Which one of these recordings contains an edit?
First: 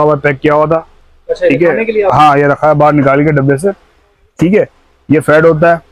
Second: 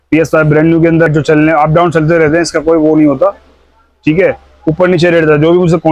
second; 1 cut; at 1.1 s

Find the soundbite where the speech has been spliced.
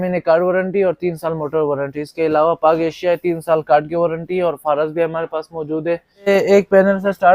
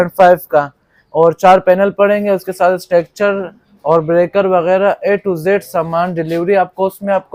first; 1 cut; at 6.3 s

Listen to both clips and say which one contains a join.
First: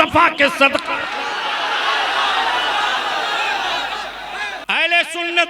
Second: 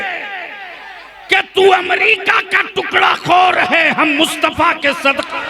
first; 1 cut; at 4.5 s

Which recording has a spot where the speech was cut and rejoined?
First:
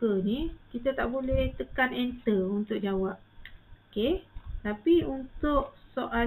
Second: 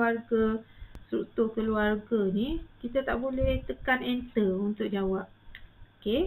second; 1 cut; at 1.0 s

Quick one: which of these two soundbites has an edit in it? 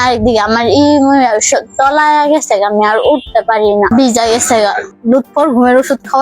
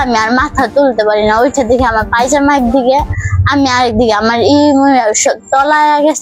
first; 2 cuts; at 3.9 s, 4.9 s

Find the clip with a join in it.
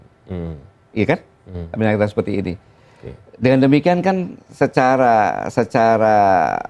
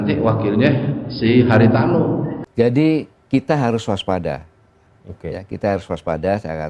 second; 1 cut; at 2.4 s

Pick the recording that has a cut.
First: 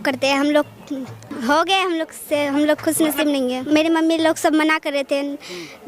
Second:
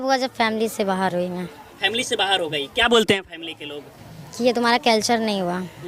first; 2 cuts; at 1.2 s, 3.6 s

